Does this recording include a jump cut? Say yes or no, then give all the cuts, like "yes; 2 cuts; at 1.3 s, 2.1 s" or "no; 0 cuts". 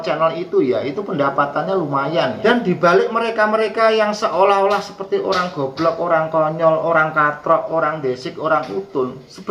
yes; 1 cut; at 2.4 s